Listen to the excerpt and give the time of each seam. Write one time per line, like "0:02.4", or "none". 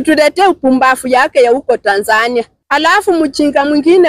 0:02.6